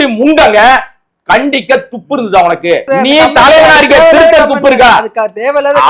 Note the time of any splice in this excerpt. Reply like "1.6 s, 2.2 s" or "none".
2.8 s